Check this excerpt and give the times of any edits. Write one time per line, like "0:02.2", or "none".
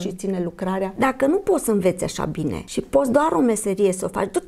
0:00.9
0:02.6